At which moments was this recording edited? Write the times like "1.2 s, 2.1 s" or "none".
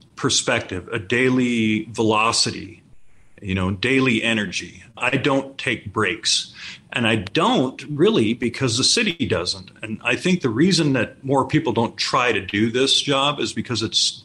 5.0 s, 11.2 s